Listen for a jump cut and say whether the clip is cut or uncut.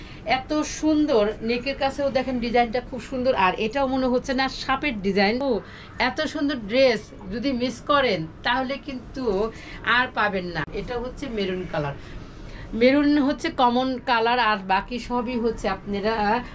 cut